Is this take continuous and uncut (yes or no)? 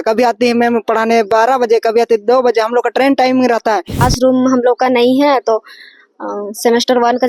no